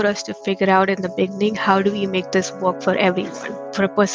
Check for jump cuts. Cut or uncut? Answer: uncut